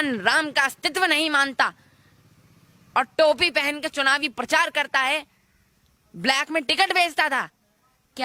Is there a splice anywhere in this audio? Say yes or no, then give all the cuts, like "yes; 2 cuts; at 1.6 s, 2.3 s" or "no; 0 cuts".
no; 0 cuts